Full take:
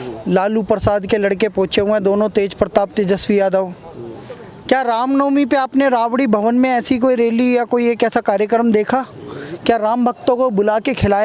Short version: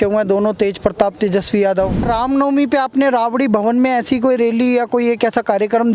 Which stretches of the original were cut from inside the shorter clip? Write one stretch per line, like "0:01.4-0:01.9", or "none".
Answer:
0:03.8-0:04.8